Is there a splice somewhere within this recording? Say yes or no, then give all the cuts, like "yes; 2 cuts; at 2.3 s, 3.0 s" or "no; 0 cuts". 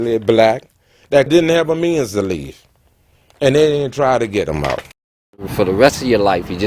yes; 2 cuts; at 1.3 s, 5.4 s